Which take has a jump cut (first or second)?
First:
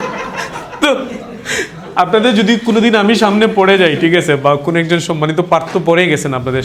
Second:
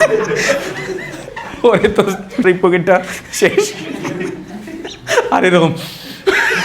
second